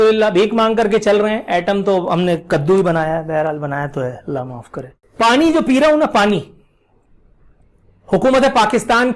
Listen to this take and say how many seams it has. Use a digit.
1